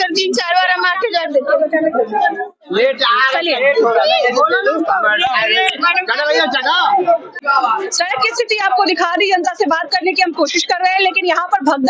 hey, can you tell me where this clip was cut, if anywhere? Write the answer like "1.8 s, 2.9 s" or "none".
none